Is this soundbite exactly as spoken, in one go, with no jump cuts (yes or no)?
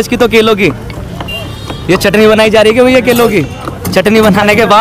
yes